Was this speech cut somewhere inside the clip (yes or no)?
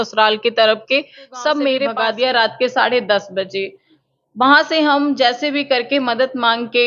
yes